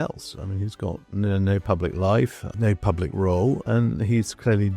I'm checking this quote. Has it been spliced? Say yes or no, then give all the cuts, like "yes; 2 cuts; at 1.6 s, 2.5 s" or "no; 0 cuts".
yes; 2 cuts; at 2.4 s, 3.6 s